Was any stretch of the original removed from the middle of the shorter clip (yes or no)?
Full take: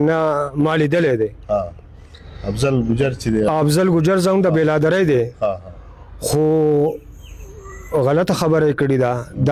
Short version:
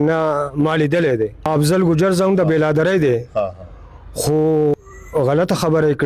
yes